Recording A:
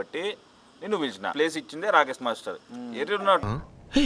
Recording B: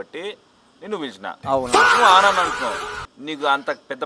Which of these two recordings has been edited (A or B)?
A